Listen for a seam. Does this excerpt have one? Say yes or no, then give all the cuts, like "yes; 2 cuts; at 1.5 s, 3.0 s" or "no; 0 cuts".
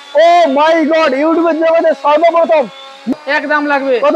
yes; 1 cut; at 3.1 s